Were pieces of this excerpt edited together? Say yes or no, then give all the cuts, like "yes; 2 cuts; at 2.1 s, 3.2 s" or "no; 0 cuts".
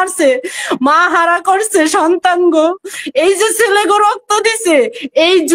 no; 0 cuts